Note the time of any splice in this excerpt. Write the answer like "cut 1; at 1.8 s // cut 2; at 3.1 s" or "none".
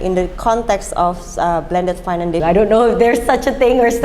cut 1; at 2.4 s